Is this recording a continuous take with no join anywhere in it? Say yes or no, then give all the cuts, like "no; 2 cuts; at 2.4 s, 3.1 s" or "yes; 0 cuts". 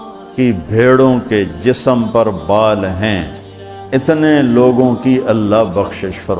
yes; 0 cuts